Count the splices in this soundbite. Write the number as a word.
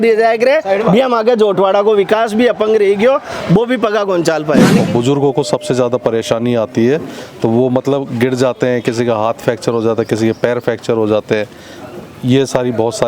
one